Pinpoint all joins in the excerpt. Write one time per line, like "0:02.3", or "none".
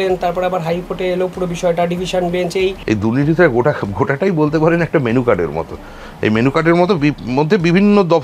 0:02.8